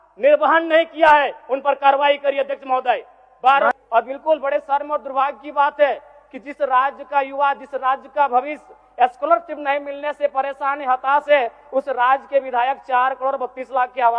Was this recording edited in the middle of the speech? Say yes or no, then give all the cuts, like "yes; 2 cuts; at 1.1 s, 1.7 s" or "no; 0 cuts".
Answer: yes; 1 cut; at 3.7 s